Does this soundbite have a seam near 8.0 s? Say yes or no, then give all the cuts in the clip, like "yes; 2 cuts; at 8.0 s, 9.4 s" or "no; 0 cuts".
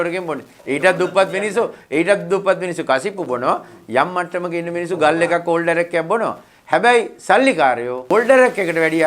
yes; 1 cut; at 8.0 s